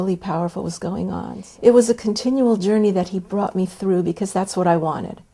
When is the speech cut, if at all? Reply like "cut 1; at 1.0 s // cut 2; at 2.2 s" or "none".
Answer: cut 1; at 1.4 s